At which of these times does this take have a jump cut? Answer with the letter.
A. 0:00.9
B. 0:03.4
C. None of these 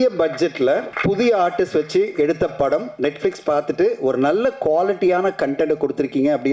A